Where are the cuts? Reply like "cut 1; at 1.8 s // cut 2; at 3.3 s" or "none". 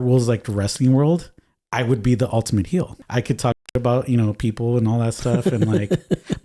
cut 1; at 2.9 s